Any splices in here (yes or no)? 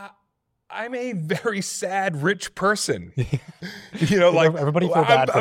no